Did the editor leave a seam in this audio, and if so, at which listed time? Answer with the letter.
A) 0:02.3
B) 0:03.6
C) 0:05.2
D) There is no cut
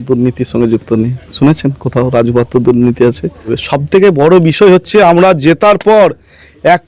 B